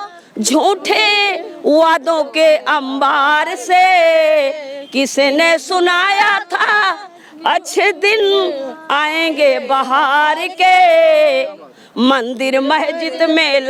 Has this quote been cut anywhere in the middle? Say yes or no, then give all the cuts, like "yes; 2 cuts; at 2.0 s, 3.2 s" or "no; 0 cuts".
no; 0 cuts